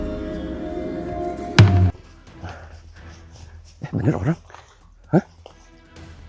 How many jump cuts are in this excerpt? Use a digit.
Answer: 1